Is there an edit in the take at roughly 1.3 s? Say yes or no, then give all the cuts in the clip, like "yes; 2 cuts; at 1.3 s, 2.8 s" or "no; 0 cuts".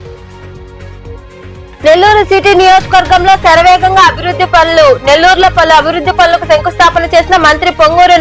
yes; 1 cut; at 1.3 s